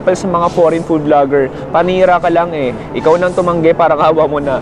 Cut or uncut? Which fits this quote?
uncut